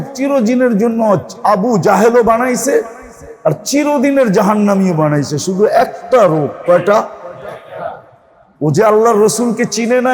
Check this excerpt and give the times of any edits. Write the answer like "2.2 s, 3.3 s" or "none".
none